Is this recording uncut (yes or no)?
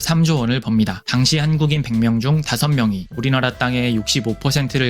no